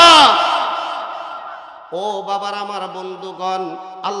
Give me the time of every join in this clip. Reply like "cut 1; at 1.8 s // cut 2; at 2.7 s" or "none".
cut 1; at 1.8 s